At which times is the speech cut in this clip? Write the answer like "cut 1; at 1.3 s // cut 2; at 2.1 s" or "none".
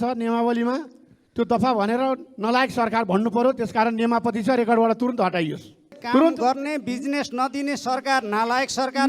cut 1; at 6.0 s